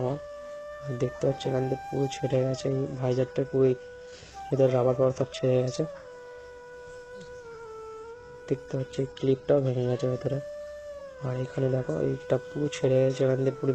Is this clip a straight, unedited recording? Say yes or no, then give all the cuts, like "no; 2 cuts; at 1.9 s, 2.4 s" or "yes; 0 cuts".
yes; 0 cuts